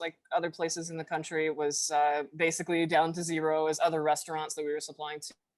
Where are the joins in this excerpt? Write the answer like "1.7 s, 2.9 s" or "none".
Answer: none